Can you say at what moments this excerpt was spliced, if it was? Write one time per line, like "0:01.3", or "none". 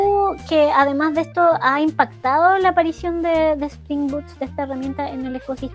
none